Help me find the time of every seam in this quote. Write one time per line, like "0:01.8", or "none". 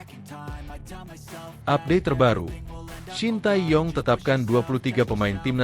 0:01.6